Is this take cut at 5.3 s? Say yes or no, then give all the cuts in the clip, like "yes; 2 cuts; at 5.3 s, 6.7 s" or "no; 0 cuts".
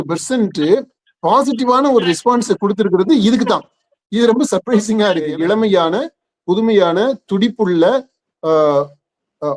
yes; 1 cut; at 5.3 s